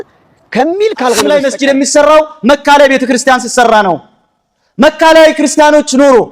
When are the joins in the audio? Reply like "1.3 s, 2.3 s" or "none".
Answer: 1.3 s